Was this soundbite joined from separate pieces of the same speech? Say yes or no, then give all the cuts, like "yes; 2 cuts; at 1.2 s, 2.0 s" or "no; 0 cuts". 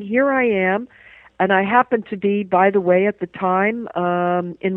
no; 0 cuts